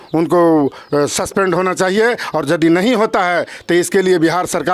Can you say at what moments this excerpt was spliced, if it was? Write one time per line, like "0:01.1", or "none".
none